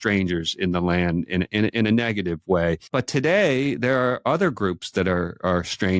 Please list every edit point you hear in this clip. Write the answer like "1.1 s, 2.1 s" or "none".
2.8 s